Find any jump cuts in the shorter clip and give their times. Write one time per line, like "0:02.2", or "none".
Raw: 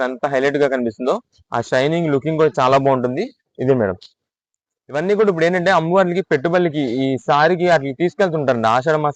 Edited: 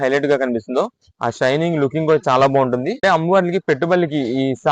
0:03.0